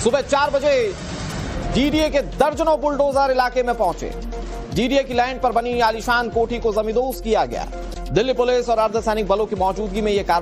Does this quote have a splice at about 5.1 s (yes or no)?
yes